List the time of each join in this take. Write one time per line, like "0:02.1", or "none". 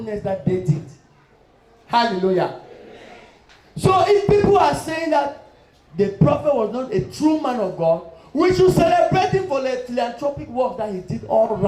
none

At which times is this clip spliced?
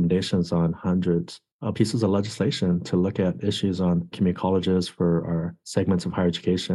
0:05.6

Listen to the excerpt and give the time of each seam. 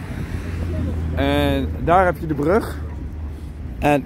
none

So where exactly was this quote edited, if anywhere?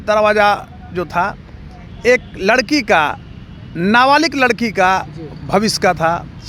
none

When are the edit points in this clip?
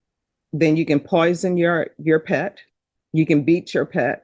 none

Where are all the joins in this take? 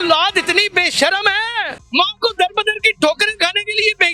0:01.8

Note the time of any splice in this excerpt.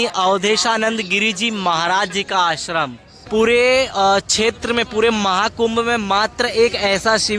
0:03.1

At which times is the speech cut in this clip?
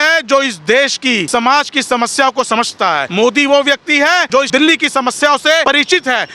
0:01.2
0:03.1
0:04.5
0:05.6

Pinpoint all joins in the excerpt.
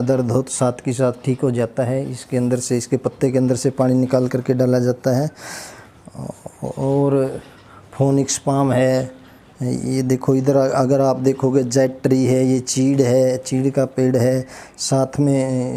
none

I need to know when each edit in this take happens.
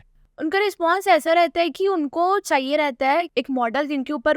0:03.3

